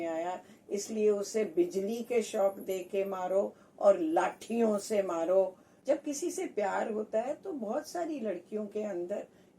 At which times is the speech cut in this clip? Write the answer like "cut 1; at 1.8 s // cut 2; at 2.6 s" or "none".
cut 1; at 5.7 s